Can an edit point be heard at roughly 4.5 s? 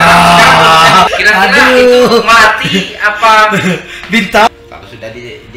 yes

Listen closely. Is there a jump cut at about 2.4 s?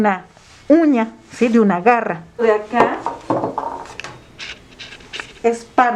yes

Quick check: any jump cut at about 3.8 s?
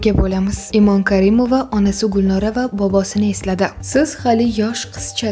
yes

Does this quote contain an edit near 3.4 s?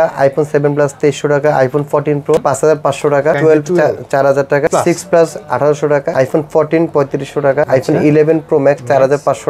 yes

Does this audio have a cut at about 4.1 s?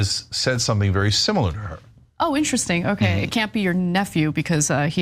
no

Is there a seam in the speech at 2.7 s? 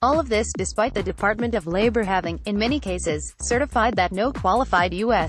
no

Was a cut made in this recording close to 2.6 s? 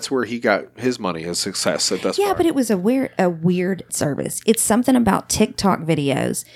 no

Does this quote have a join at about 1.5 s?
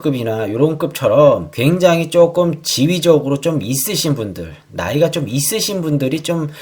yes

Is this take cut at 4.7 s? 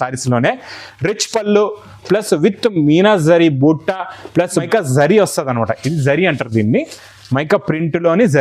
yes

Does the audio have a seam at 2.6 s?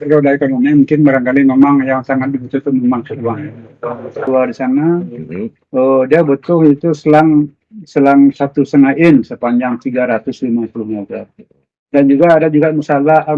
no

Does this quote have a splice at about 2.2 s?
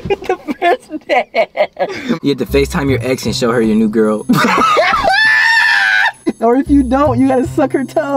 yes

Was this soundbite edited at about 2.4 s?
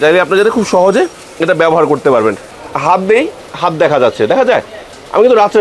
yes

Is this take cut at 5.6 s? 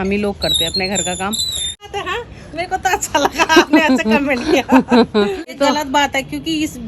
yes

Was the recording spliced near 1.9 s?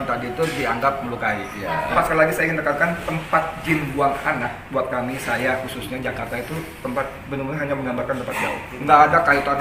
yes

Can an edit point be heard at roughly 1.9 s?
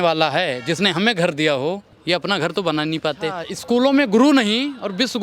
yes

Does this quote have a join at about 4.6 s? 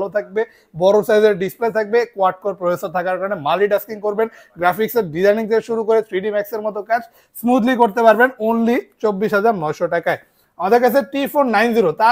no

